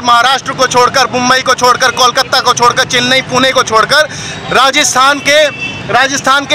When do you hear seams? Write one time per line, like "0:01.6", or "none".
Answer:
none